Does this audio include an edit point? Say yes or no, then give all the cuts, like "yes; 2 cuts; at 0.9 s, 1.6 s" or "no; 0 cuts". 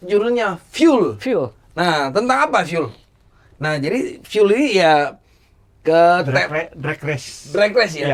no; 0 cuts